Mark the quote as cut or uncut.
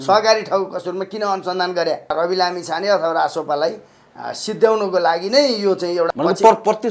cut